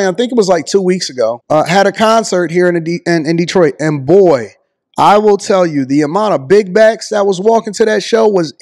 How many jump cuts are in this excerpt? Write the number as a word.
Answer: one